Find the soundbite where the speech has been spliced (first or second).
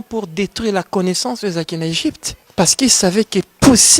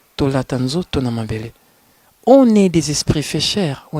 first